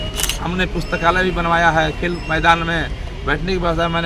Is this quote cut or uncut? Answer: uncut